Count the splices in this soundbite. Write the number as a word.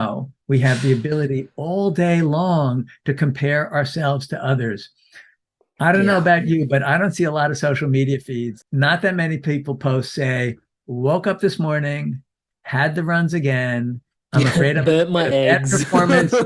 one